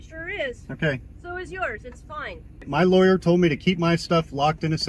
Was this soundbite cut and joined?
yes; 1 cut; at 2.5 s

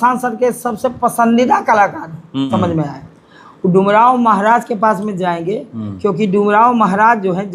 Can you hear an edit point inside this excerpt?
yes; 1 cut; at 2.5 s

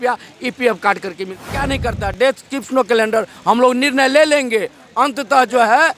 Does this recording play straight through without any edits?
no; 1 cut; at 1.4 s

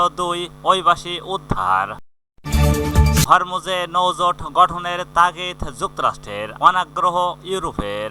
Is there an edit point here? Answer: yes; 1 cut; at 2.1 s

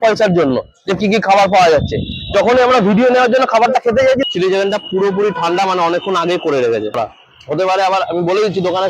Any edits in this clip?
yes; 2 cuts; at 4.2 s, 7.0 s

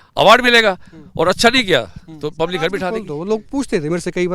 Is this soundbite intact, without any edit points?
no; 1 cut; at 3.1 s

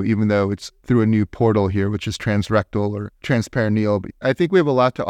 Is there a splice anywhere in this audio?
yes; 1 cut; at 4.1 s

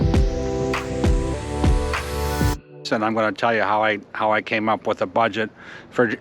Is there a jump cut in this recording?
yes; 1 cut; at 2.9 s

